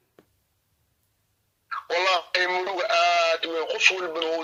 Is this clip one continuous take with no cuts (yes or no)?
yes